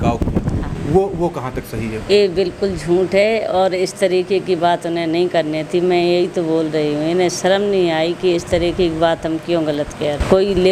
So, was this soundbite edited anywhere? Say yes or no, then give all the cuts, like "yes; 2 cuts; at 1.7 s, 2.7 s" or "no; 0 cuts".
no; 0 cuts